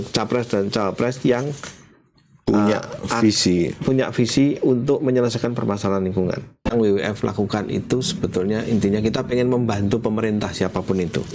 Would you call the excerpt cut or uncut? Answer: cut